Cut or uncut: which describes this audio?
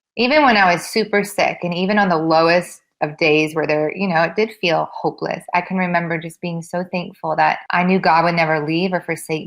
cut